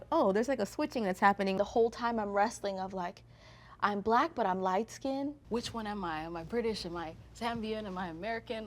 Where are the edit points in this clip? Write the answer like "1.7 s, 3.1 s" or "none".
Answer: 1.6 s, 5.4 s